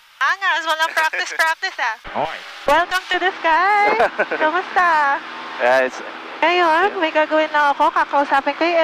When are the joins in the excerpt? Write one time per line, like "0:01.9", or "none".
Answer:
0:02.0